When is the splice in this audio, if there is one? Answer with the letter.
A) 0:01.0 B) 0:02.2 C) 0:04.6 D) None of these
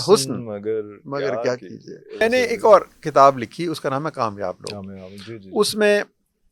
B